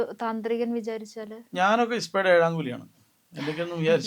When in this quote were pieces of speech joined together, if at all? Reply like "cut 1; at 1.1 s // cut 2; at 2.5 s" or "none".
none